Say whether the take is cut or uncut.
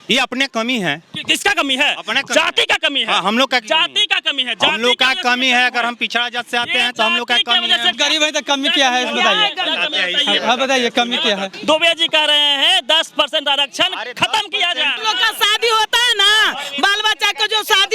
cut